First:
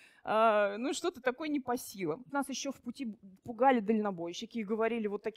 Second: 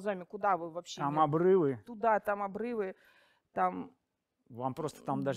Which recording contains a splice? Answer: first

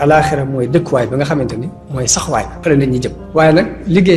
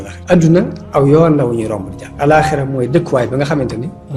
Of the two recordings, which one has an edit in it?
first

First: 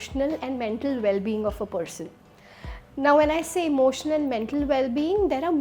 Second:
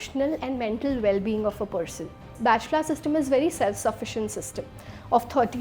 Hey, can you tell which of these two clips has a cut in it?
second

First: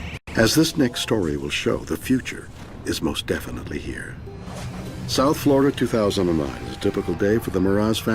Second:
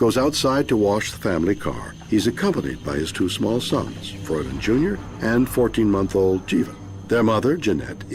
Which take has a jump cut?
first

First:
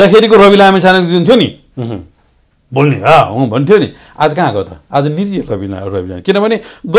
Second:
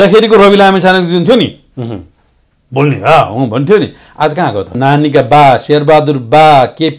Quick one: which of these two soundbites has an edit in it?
second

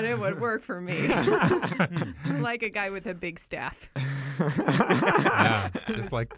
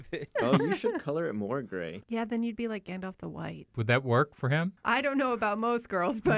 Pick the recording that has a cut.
second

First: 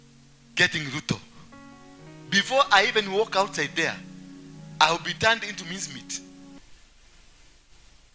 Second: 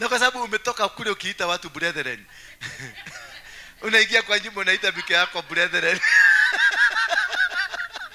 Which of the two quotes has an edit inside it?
first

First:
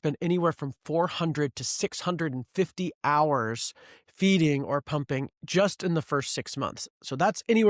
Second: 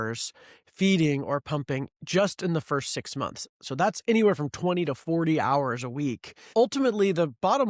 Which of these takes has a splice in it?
second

